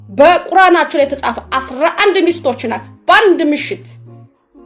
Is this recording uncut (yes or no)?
yes